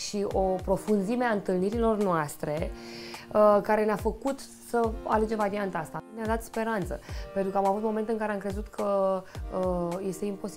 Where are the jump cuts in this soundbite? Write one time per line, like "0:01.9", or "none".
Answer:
0:06.0